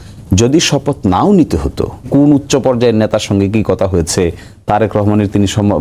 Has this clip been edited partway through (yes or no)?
yes